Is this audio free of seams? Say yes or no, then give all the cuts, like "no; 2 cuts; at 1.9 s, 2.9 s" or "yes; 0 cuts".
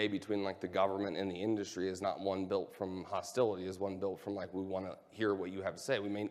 yes; 0 cuts